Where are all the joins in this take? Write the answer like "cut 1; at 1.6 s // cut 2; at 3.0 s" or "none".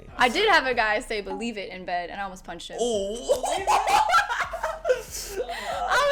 none